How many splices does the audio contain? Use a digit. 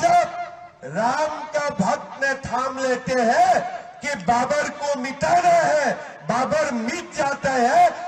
0